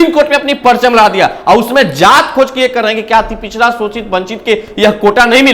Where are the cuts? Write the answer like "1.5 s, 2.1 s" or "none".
none